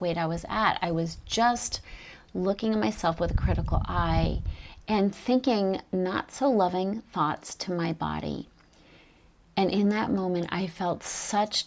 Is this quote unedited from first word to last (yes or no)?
yes